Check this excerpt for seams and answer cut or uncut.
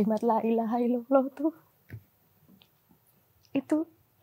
uncut